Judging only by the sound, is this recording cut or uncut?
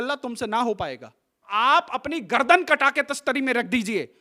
cut